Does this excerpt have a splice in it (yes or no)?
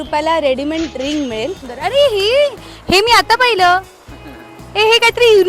yes